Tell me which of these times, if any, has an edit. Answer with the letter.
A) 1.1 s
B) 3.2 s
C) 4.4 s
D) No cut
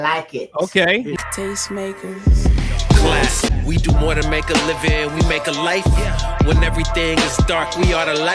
A